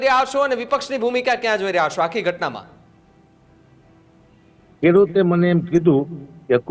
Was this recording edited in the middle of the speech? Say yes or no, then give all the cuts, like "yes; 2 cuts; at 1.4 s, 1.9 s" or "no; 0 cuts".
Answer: no; 0 cuts